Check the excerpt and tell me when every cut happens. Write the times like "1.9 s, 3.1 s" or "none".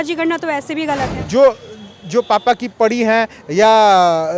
1.1 s